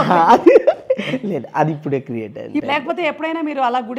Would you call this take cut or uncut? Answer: cut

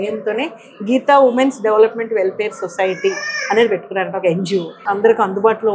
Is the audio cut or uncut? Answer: cut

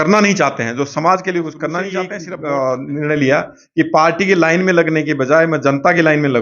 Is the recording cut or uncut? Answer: cut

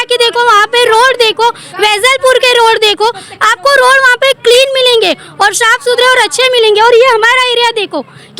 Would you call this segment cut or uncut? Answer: uncut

